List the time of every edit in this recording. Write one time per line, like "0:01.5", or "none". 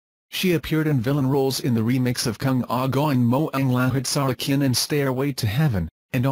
none